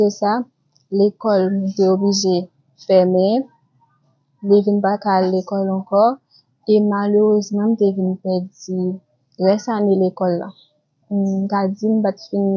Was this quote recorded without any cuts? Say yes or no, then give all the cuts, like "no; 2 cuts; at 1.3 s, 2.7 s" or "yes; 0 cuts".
yes; 0 cuts